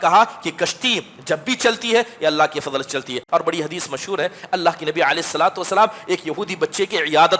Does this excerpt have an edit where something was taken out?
yes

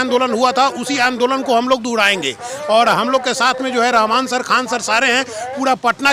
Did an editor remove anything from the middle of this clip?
no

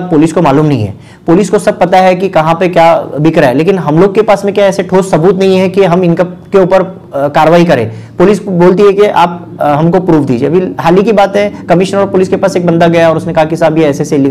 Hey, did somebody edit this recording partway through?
no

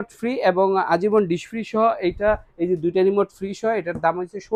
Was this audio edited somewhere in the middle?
no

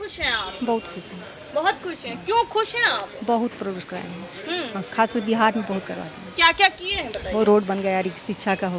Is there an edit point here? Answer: no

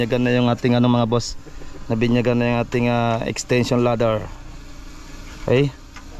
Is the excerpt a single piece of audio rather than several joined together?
yes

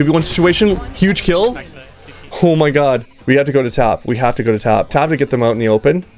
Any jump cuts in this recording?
yes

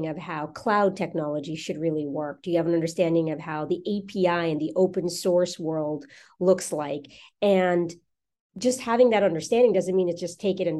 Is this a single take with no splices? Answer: yes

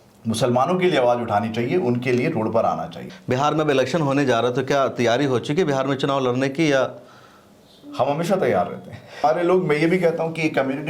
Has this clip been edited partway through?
yes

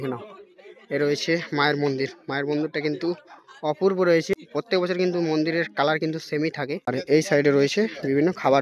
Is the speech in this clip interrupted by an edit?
yes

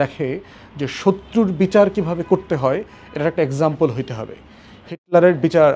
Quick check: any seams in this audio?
no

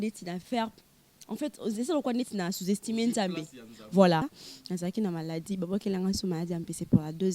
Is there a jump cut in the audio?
yes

